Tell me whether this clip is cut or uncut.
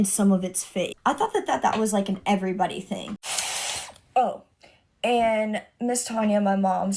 cut